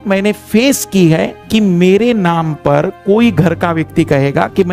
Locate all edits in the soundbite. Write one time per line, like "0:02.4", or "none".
0:01.4